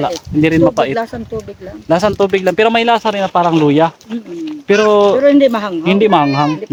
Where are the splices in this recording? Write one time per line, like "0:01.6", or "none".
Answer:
none